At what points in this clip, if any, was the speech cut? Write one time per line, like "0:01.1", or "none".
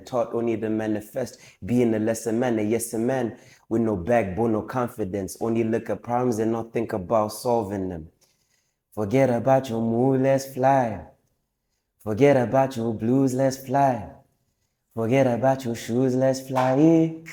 none